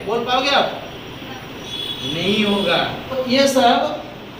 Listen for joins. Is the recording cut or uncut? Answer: cut